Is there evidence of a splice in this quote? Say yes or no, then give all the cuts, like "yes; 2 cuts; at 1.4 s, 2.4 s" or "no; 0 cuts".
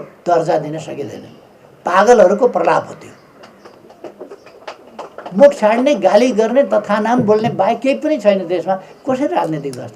no; 0 cuts